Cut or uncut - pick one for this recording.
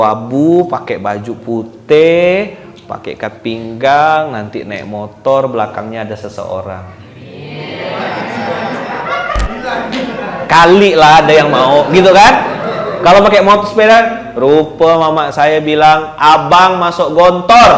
uncut